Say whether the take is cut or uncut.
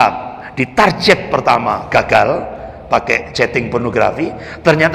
uncut